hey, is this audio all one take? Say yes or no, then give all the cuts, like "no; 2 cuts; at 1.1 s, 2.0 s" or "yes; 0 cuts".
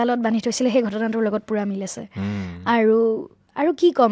yes; 0 cuts